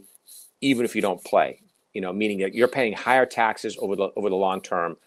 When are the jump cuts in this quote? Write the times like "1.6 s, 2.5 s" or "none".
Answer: none